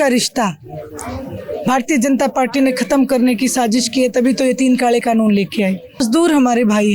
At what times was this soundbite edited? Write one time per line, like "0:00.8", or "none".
0:06.0